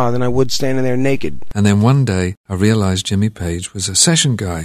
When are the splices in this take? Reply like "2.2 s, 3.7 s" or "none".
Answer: 1.4 s, 2.4 s